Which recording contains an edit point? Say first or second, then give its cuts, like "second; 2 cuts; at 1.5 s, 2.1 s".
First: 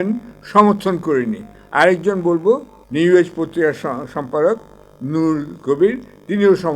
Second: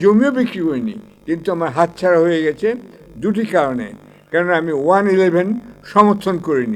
first; 1 cut; at 2.8 s